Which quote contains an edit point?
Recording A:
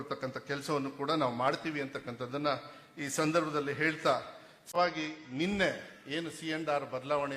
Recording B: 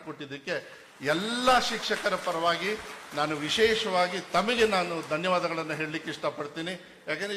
A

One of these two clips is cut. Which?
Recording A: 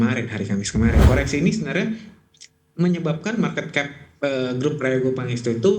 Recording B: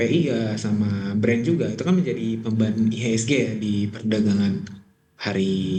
A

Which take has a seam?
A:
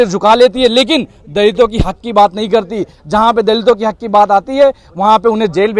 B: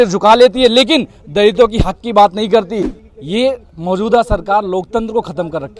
B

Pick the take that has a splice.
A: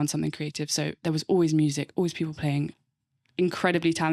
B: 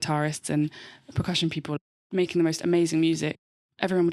B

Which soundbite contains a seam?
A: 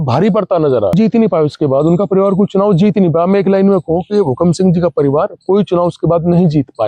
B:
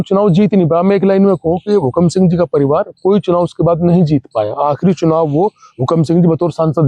A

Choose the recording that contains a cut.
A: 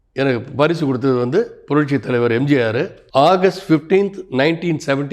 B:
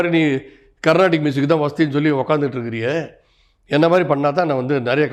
A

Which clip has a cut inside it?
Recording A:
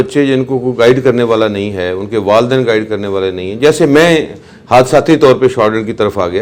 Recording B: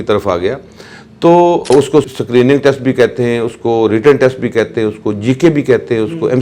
B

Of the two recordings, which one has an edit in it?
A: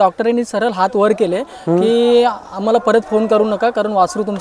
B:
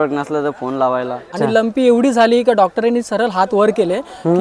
B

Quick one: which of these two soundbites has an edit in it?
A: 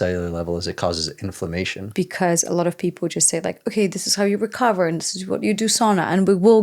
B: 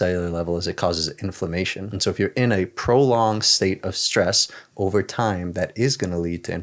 A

